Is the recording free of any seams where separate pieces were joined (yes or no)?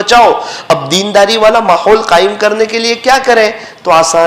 yes